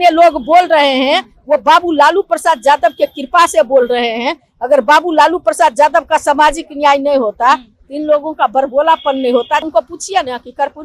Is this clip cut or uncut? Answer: cut